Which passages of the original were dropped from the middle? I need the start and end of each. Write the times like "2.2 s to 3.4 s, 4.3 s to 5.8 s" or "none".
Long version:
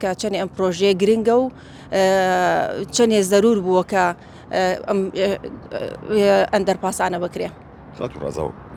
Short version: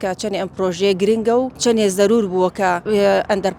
1.5 s to 2.9 s, 4.2 s to 6.1 s